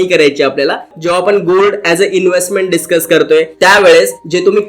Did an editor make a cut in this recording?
yes; 1 cut; at 0.9 s

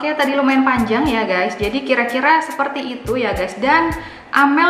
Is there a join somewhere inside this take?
no; 0 cuts

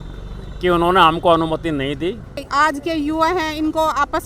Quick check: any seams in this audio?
yes; 1 cut; at 2.4 s

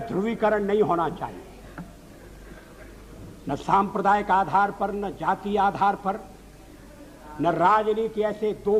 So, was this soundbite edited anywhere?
no; 0 cuts

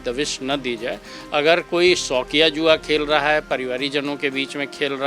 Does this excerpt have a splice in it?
no; 0 cuts

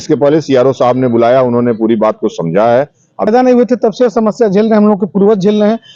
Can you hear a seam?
yes; 1 cut; at 3.3 s

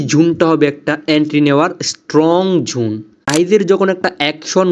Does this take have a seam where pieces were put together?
yes; 1 cut; at 3.1 s

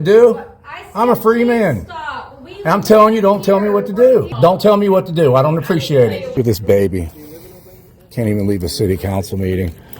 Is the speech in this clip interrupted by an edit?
yes; 2 cuts; at 4.3 s, 6.4 s

